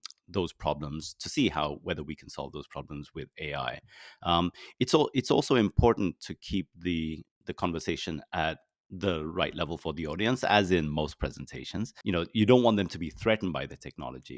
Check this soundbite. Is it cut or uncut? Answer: cut